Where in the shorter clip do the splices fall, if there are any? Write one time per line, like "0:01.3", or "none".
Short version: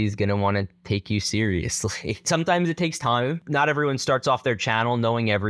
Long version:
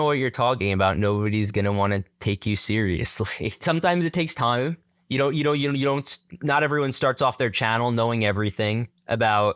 0:03.4